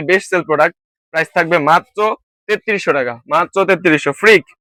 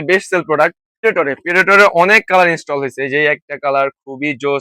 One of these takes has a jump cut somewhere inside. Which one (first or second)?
second